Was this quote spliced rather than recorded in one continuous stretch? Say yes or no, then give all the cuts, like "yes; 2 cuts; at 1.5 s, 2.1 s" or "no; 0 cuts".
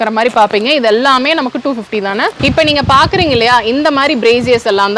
yes; 1 cut; at 2.4 s